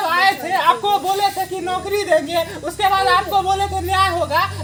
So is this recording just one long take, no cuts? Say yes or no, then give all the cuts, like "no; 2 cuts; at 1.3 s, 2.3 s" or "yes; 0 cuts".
yes; 0 cuts